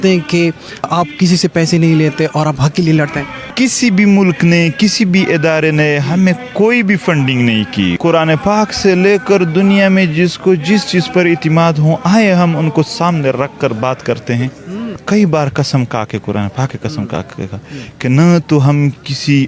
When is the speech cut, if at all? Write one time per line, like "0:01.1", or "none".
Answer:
0:00.9
0:03.5
0:08.0
0:15.0